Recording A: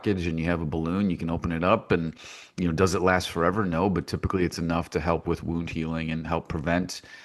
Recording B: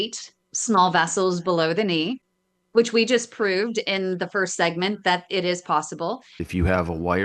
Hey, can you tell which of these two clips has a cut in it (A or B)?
B